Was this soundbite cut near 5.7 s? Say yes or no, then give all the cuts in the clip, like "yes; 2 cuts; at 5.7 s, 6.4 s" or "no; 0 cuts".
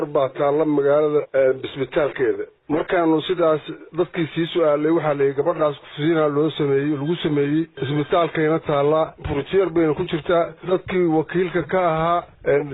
no; 0 cuts